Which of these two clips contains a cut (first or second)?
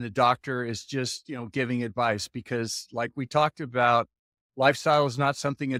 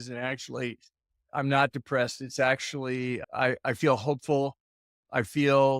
second